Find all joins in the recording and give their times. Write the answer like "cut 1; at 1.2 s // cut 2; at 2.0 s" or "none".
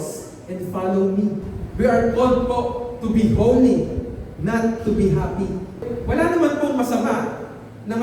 cut 1; at 1.6 s // cut 2; at 5.9 s